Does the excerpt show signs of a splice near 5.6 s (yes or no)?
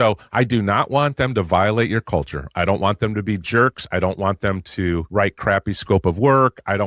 yes